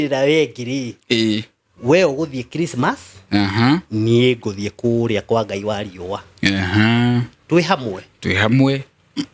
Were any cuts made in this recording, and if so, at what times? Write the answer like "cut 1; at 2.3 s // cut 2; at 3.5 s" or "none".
none